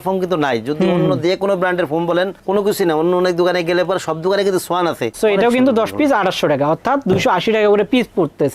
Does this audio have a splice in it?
yes; 1 cut; at 5.1 s

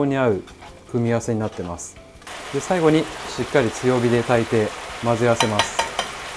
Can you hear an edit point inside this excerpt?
no; 0 cuts

